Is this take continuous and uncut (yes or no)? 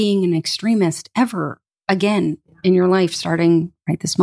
yes